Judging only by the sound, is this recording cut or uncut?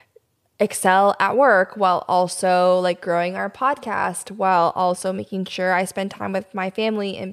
uncut